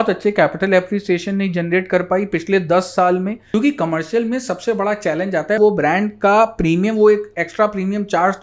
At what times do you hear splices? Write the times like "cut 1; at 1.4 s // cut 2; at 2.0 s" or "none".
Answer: cut 1; at 3.4 s // cut 2; at 5.6 s